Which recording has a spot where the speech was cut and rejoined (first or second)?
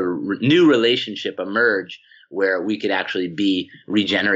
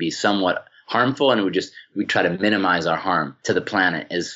second